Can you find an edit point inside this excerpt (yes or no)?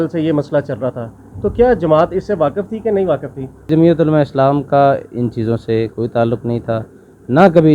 yes